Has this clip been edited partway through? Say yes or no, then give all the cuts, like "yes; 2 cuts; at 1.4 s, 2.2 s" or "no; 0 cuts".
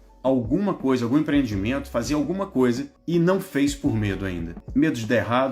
yes; 2 cuts; at 2.9 s, 4.5 s